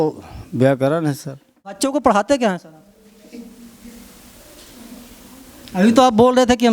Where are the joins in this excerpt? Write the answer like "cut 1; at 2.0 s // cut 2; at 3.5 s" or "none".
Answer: cut 1; at 1.8 s